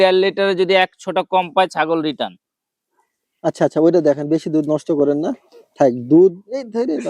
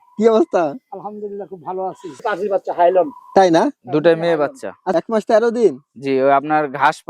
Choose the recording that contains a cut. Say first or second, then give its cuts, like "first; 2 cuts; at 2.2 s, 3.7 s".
second; 2 cuts; at 2.2 s, 4.9 s